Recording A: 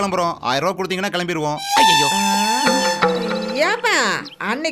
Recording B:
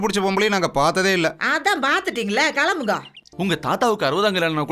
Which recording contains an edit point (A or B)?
B